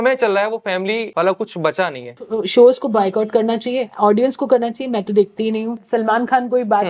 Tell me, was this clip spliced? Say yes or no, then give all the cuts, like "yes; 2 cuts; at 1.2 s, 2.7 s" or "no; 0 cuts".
yes; 3 cuts; at 1.1 s, 2.4 s, 5.8 s